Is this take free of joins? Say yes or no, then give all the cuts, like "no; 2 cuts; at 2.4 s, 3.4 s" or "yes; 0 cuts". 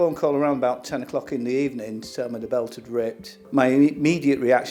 yes; 0 cuts